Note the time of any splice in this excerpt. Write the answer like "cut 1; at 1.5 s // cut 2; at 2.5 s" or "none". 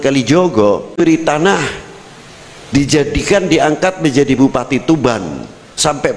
cut 1; at 0.9 s